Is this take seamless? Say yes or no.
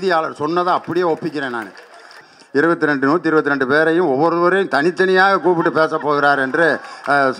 no